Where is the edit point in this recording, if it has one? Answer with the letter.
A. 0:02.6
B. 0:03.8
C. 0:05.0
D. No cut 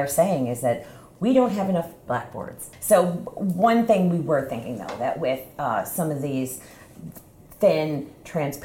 A